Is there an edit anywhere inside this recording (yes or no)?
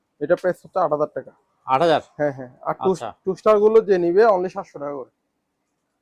no